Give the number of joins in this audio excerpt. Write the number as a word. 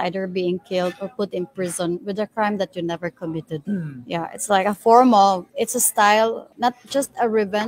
three